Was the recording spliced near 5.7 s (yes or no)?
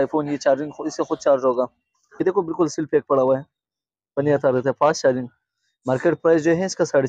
no